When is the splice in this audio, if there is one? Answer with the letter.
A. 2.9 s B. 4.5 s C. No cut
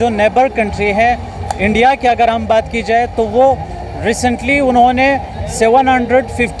C